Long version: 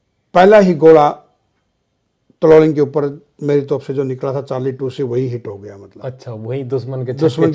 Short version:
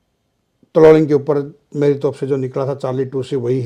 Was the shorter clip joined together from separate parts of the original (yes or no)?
no